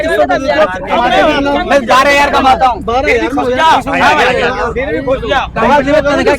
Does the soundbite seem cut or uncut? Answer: uncut